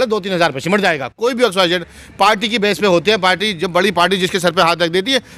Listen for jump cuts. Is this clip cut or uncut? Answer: uncut